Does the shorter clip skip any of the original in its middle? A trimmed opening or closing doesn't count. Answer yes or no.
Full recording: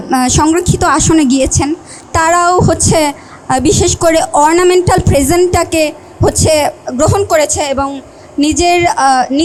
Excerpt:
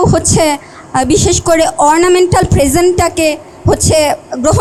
no